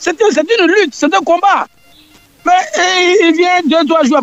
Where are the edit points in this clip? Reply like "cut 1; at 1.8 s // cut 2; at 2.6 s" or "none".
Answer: none